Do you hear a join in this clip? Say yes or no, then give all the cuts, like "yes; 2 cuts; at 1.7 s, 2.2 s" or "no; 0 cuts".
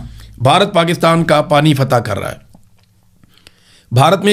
no; 0 cuts